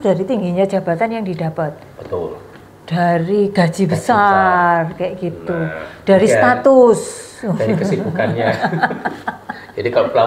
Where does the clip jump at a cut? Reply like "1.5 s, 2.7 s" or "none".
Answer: none